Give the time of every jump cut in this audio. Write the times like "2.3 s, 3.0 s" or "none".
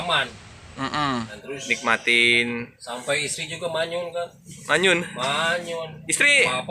1.4 s